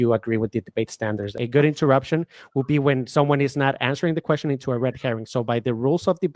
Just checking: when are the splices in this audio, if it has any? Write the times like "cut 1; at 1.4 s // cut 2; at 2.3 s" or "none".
cut 1; at 1.3 s

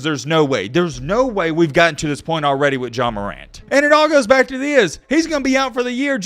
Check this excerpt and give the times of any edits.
cut 1; at 3.6 s

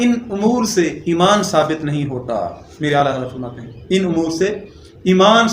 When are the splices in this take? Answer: cut 1; at 2.6 s

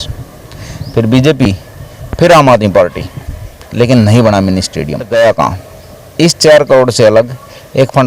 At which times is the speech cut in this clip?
cut 1; at 5.0 s

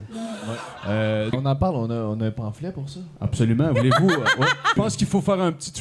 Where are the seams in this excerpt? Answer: cut 1; at 1.3 s // cut 2; at 4.7 s

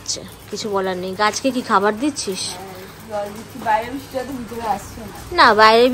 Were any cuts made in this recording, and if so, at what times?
none

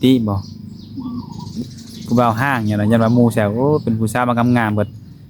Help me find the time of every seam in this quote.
cut 1; at 1.6 s

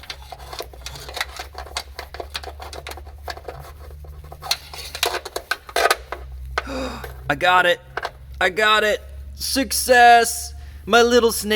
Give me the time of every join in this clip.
none

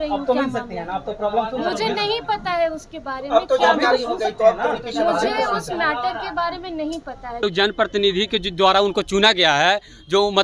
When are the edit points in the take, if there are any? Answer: cut 1; at 7.4 s

